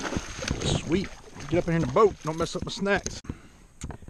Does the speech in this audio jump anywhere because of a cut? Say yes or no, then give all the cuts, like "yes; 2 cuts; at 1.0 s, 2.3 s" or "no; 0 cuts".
yes; 1 cut; at 3.2 s